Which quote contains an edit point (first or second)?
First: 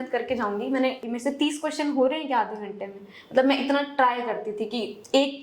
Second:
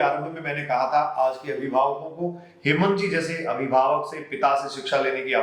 first